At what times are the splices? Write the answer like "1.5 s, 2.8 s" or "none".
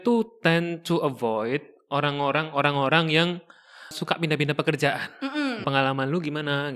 3.9 s, 5.6 s